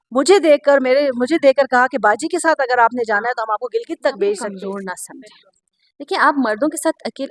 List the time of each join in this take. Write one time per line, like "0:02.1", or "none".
0:04.6